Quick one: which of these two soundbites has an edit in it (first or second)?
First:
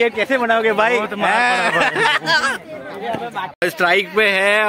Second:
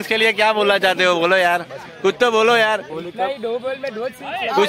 first